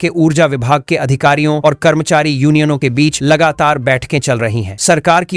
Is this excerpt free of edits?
yes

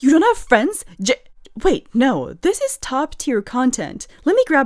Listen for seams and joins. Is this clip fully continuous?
yes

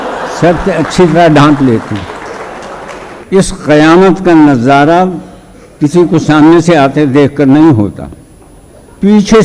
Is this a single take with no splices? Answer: no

